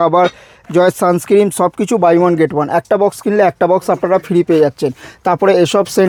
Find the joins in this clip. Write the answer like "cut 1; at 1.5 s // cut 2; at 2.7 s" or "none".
none